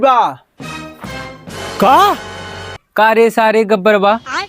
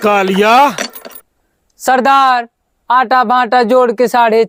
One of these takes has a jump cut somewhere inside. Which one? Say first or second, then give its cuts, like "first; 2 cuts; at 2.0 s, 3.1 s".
first; 1 cut; at 2.8 s